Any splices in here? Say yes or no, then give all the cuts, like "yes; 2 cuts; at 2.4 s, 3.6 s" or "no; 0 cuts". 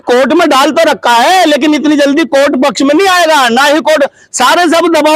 no; 0 cuts